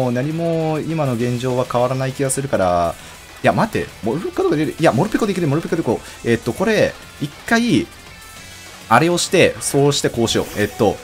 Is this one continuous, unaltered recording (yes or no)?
yes